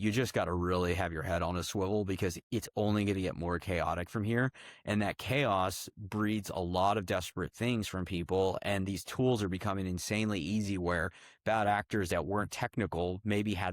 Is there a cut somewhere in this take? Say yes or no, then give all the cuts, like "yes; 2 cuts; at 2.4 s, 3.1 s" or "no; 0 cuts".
no; 0 cuts